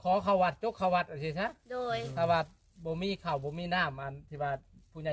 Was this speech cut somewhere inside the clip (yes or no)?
no